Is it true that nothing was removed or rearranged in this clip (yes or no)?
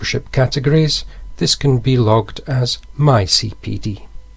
yes